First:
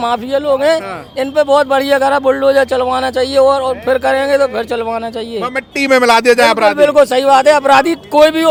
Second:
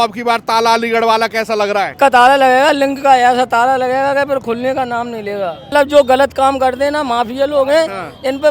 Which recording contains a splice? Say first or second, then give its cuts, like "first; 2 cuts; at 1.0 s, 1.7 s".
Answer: second; 2 cuts; at 1.9 s, 5.7 s